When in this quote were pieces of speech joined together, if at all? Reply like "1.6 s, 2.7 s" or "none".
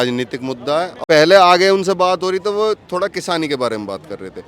0.9 s